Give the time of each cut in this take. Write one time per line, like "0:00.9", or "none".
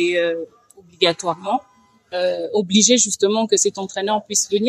none